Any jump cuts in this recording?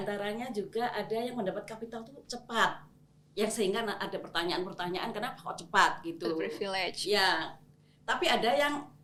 no; 0 cuts

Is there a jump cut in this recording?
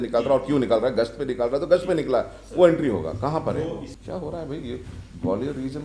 yes; 1 cut; at 3.9 s

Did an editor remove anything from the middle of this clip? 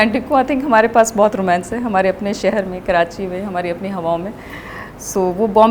no; 0 cuts

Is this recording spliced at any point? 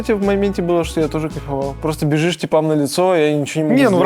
no; 0 cuts

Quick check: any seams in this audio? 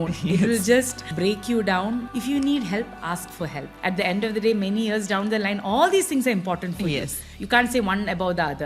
yes; 4 cuts; at 1.0 s, 2.1 s, 3.7 s, 7.2 s

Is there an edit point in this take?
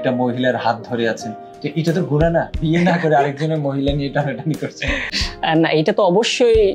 yes; 2 cuts; at 2.6 s, 5.2 s

